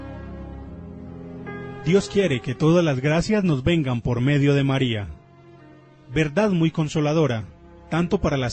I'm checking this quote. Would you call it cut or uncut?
cut